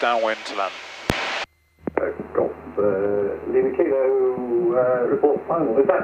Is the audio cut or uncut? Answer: cut